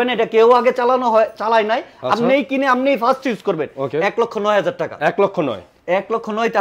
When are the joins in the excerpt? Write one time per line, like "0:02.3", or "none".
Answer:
none